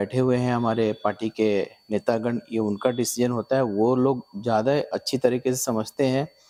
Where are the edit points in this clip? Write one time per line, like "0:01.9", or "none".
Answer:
none